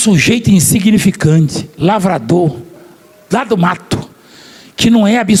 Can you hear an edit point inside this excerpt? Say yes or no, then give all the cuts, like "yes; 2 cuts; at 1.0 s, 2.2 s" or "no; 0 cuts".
no; 0 cuts